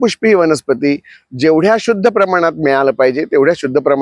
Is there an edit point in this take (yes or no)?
no